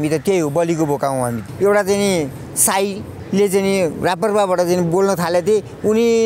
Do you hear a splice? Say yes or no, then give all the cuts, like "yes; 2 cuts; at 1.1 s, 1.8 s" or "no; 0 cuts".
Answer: yes; 1 cut; at 1.5 s